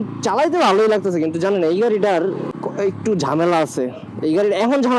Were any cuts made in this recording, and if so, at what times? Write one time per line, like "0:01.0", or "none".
0:02.5